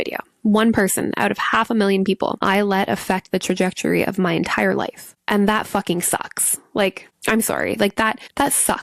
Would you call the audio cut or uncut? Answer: uncut